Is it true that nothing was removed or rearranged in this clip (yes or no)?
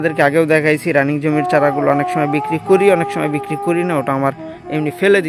yes